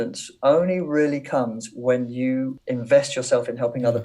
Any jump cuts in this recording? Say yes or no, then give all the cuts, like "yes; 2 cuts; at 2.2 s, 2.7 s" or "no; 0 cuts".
yes; 1 cut; at 2.6 s